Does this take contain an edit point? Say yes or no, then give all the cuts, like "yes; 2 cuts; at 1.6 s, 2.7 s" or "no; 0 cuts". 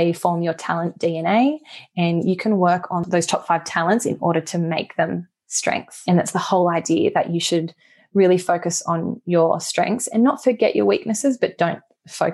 yes; 1 cut; at 3.1 s